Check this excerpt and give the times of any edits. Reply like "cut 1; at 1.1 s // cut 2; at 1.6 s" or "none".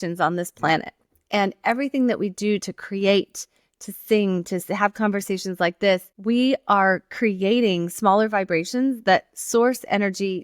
cut 1; at 6.1 s